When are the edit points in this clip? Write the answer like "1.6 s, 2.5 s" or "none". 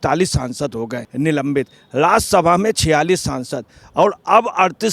1.0 s